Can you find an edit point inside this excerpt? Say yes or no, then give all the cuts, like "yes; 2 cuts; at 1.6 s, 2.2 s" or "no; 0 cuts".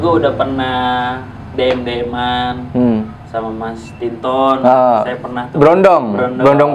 no; 0 cuts